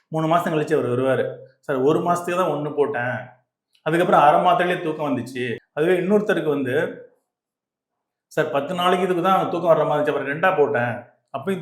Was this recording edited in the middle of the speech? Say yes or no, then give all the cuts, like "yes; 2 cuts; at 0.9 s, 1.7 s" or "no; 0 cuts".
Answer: yes; 1 cut; at 5.6 s